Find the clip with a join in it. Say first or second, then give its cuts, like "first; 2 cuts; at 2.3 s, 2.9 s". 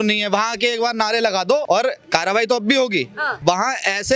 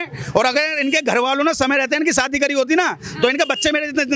first; 2 cuts; at 1.6 s, 3.2 s